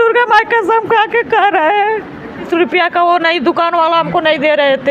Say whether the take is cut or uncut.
cut